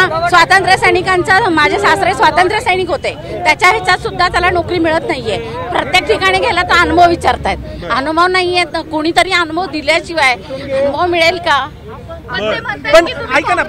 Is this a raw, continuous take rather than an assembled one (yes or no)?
yes